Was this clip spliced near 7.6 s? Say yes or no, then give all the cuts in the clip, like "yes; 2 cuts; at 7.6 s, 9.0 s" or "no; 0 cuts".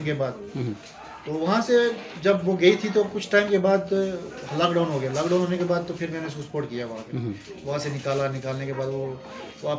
no; 0 cuts